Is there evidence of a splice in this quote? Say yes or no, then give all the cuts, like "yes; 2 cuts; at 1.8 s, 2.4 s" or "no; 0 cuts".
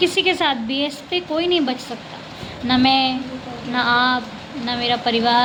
no; 0 cuts